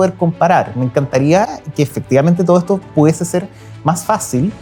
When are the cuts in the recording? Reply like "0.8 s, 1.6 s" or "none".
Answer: none